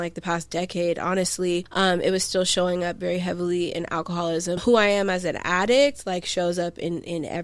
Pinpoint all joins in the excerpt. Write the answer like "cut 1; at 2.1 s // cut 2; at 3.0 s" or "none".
cut 1; at 1.7 s // cut 2; at 4.6 s